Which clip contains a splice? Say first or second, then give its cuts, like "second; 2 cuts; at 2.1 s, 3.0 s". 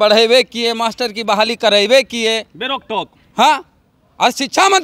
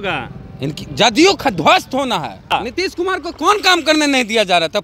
second; 1 cut; at 2.5 s